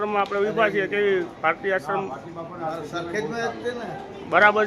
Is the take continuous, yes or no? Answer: yes